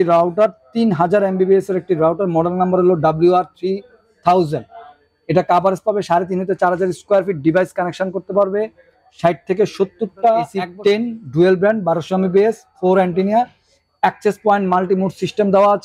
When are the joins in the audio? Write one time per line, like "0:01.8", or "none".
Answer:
0:10.6